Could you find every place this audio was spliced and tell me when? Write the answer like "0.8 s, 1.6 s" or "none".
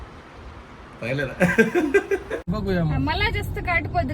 2.5 s